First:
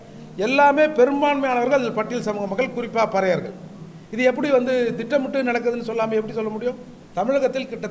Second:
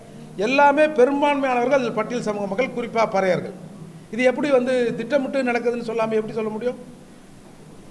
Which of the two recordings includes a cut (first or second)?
first